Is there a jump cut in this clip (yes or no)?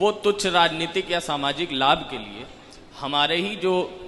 no